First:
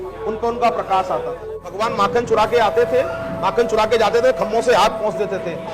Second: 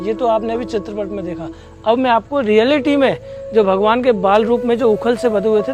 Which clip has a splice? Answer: first; 1 cut; at 1.7 s

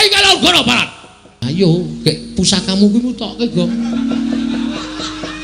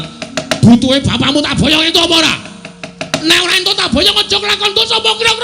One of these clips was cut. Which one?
first; 1 cut; at 1.3 s

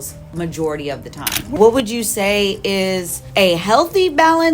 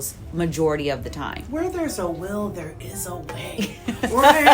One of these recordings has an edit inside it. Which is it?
first; 2 cuts; at 1.5 s, 3.2 s

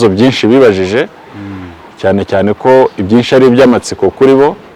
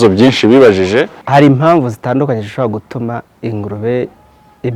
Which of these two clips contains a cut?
second; 1 cut; at 1.2 s

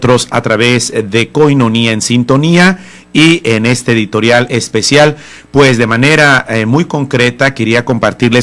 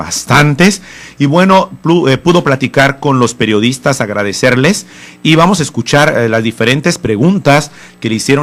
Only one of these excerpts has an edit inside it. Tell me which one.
first; 1 cut; at 2.0 s

